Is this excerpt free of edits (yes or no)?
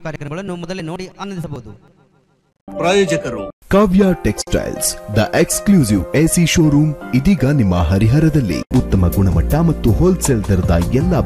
no